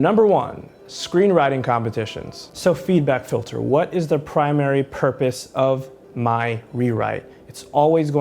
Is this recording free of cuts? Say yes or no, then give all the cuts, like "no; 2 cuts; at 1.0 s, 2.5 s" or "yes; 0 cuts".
no; 1 cut; at 2.4 s